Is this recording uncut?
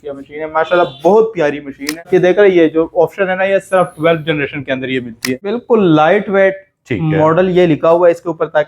no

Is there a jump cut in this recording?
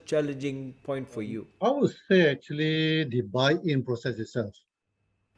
yes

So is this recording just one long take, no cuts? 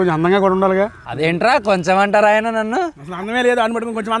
no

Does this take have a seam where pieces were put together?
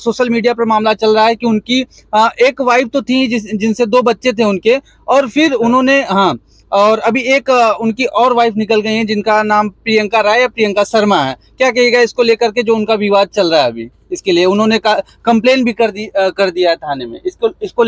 no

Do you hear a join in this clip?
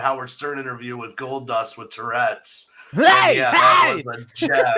no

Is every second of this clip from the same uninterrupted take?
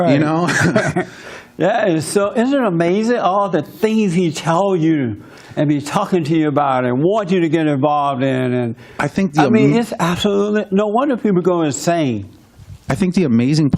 yes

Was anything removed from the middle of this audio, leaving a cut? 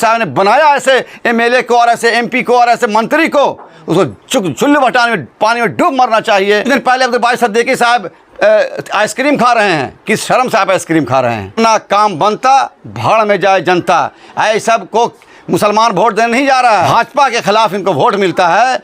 yes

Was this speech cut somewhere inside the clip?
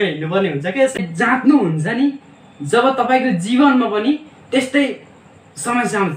yes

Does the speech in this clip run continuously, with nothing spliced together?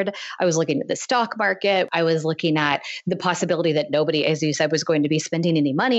no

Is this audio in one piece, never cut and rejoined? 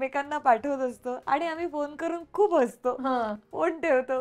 yes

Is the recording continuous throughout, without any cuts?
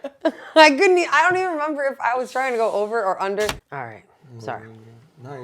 no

